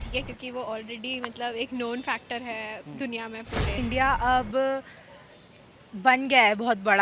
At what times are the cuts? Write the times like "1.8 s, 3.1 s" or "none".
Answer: 3.7 s

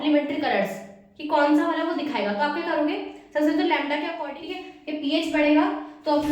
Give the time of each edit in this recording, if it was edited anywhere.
4.2 s

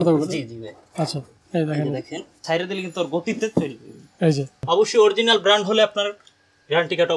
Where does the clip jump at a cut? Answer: 2.4 s, 4.6 s

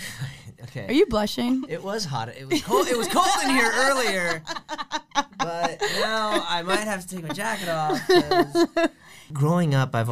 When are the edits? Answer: 9.2 s

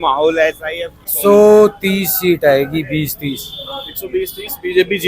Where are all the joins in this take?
1.1 s

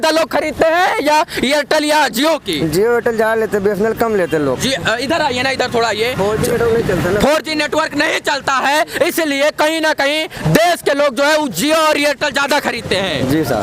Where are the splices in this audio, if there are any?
none

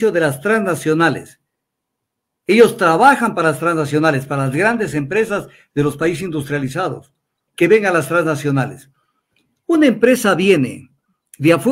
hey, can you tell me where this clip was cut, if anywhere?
7.4 s

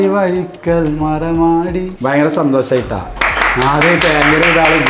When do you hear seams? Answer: 1.9 s

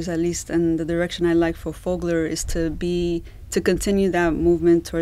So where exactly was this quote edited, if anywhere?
none

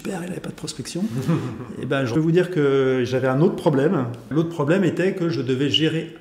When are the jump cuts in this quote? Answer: 2.1 s, 4.2 s

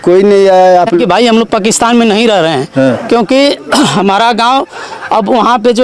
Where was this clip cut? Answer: 1.0 s

